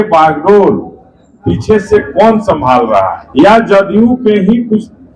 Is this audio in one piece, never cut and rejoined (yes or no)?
no